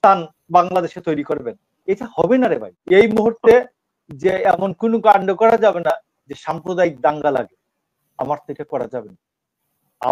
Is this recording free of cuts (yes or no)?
no